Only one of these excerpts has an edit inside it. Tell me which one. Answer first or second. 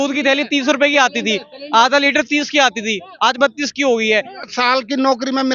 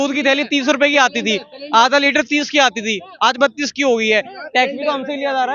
first